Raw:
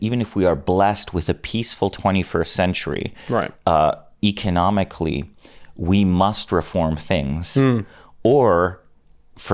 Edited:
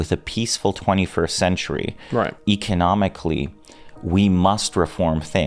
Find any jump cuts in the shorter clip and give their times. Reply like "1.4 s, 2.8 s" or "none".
2.4 s